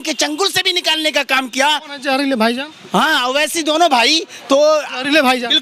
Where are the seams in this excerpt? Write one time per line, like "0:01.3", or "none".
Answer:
none